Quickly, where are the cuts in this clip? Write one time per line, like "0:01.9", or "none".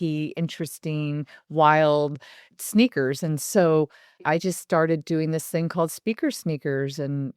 0:02.5
0:04.2